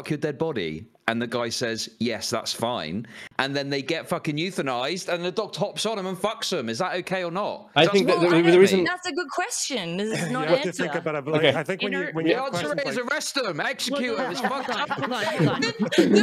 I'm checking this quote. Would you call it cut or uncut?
uncut